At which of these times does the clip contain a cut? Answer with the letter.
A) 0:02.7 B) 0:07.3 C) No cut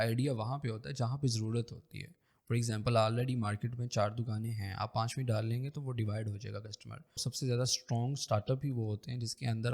B